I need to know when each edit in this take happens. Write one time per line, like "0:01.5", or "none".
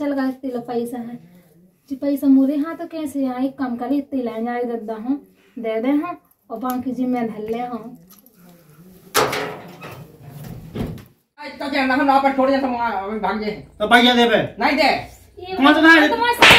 0:11.6